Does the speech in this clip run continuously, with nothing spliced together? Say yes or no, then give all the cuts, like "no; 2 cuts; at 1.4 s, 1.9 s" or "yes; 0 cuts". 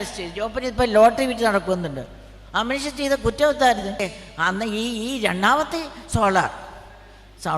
no; 1 cut; at 4.0 s